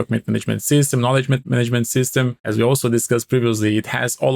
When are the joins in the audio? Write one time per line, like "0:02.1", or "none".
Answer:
0:01.4
0:02.4